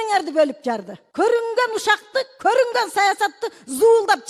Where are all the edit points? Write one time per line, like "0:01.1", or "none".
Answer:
0:01.0